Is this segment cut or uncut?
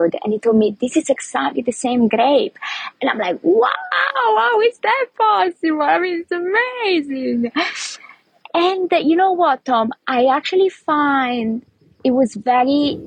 uncut